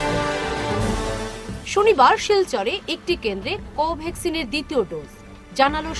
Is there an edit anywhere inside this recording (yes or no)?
no